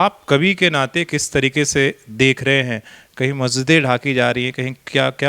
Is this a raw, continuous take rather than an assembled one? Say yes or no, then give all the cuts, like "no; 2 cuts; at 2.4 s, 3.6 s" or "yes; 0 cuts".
yes; 0 cuts